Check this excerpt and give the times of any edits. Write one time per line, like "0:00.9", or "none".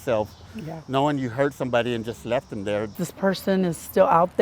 0:03.0